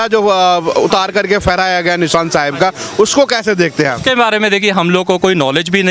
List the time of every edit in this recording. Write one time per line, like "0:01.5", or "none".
none